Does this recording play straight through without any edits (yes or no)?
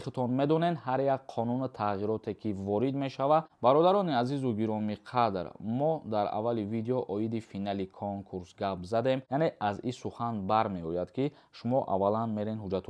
no